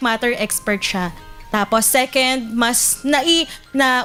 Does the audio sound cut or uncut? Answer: uncut